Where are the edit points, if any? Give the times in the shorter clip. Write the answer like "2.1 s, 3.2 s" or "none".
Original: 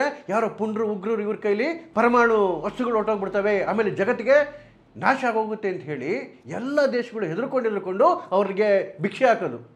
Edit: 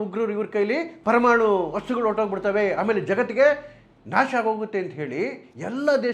none